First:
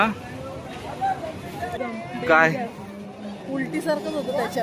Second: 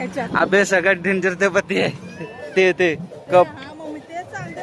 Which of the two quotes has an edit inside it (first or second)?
first